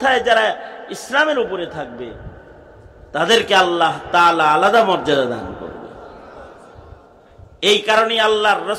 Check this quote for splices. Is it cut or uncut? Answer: cut